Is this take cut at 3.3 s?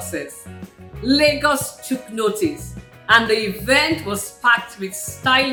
no; 0 cuts

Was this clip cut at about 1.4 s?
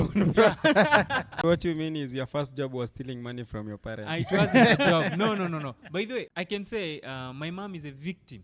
yes; 2 cuts; at 1.4 s, 6.3 s

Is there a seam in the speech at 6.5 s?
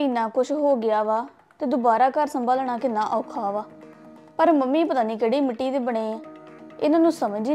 no; 0 cuts

